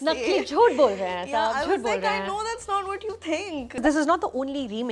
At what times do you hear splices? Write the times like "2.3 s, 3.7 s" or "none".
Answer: 3.8 s